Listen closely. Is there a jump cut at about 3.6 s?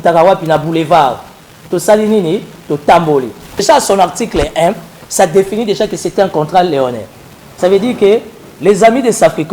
yes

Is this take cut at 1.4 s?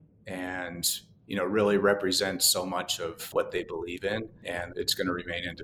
no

